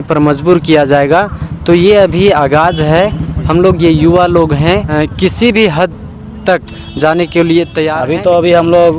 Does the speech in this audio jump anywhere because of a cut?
yes; 2 cuts; at 4.9 s, 8.0 s

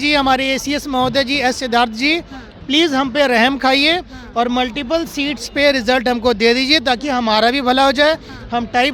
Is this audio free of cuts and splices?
yes; 0 cuts

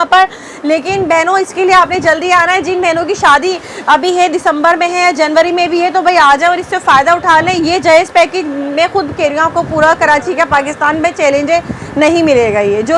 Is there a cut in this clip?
no; 0 cuts

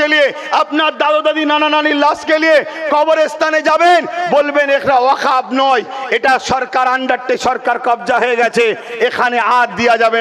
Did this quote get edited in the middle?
no; 0 cuts

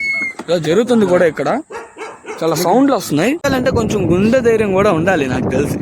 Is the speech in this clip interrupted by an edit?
yes; 1 cut; at 3.5 s

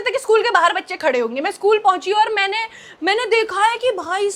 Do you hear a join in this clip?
no; 0 cuts

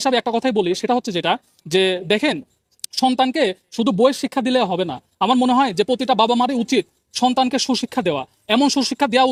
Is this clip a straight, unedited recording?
yes; 0 cuts

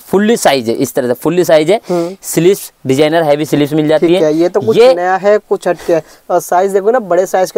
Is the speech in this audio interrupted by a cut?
no; 0 cuts

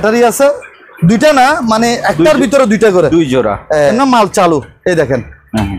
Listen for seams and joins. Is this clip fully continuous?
no; 1 cut; at 3.9 s

